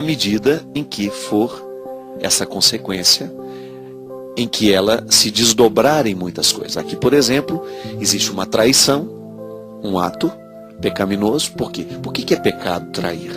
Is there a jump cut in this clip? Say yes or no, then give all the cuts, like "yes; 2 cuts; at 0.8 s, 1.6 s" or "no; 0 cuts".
yes; 1 cut; at 3.8 s